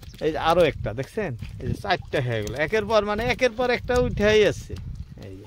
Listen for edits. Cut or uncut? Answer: uncut